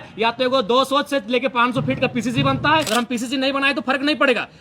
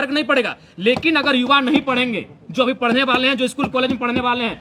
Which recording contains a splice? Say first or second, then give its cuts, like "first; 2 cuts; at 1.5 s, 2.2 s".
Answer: first; 1 cut; at 2.9 s